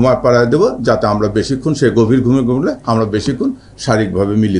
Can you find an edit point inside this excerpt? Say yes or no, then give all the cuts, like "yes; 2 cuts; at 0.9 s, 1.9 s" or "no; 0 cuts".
no; 0 cuts